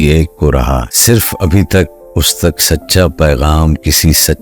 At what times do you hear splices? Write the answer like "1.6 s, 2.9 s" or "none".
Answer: 0.9 s